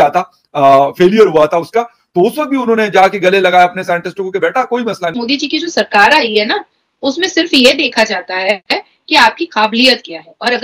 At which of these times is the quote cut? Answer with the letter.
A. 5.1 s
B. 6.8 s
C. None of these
A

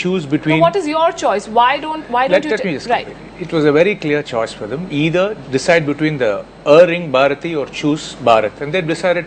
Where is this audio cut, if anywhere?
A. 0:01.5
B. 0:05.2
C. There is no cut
A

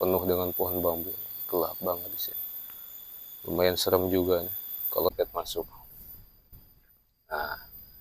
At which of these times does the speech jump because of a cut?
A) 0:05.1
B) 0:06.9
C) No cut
A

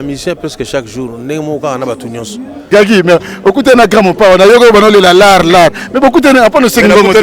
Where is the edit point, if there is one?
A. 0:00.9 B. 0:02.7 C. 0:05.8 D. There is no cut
B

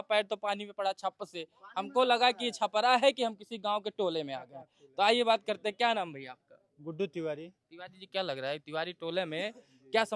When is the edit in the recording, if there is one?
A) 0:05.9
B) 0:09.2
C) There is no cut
C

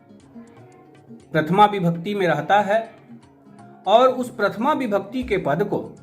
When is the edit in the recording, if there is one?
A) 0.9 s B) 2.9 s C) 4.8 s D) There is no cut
A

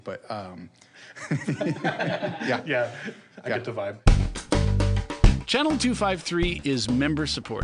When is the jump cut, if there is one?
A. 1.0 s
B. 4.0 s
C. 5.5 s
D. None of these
B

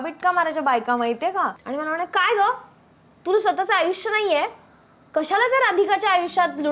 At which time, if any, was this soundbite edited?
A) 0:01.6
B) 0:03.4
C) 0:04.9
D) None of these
A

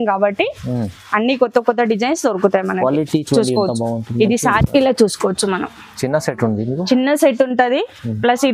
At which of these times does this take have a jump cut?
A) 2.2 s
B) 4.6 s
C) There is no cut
B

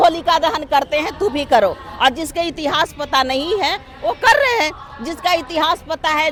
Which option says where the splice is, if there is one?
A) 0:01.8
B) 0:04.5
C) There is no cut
C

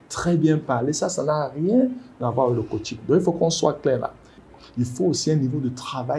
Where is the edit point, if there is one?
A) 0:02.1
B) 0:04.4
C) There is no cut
B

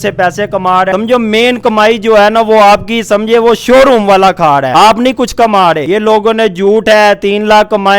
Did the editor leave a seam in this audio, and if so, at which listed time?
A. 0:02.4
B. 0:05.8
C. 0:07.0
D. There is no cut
D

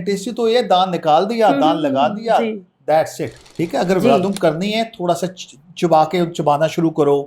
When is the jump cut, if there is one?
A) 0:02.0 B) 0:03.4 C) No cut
B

